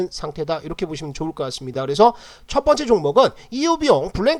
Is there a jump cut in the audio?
no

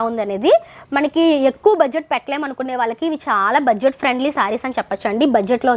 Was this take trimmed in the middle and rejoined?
no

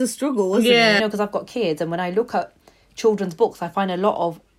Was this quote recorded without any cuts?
no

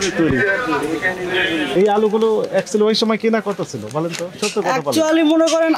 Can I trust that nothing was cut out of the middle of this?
no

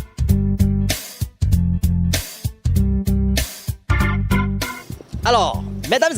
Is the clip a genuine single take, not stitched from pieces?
no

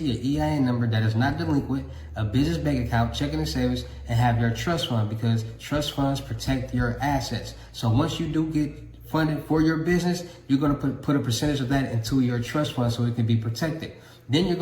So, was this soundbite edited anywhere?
yes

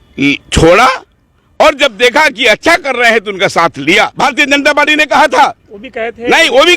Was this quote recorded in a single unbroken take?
no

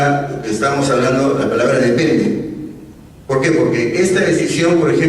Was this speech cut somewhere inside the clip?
yes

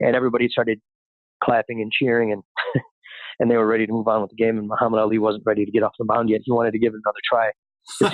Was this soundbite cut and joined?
no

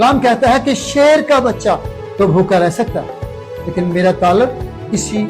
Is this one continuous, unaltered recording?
no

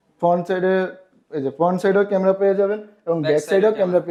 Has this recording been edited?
no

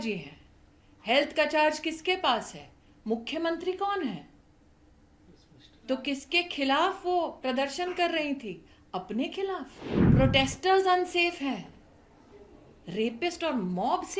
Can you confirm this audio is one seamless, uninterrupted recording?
no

